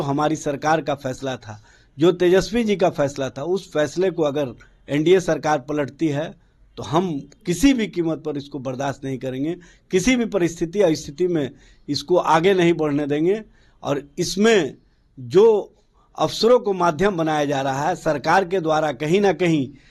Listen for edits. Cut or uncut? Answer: uncut